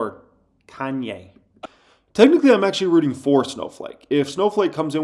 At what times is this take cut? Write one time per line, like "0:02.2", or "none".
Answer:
0:01.6